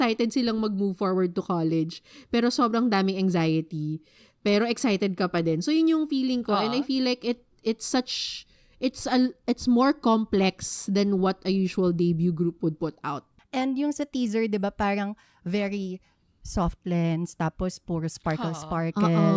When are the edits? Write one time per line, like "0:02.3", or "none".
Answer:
0:13.7